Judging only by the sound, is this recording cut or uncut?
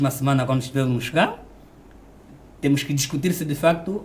uncut